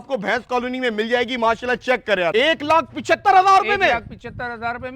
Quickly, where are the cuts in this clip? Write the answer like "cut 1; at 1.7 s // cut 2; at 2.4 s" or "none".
cut 1; at 2.3 s